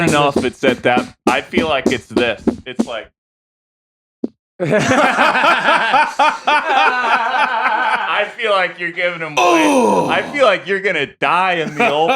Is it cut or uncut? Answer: uncut